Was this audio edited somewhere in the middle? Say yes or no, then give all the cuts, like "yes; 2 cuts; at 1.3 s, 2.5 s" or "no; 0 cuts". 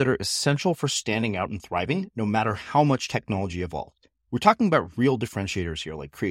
no; 0 cuts